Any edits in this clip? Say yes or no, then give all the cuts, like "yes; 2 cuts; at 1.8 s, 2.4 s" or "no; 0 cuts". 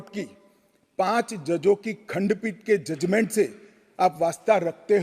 no; 0 cuts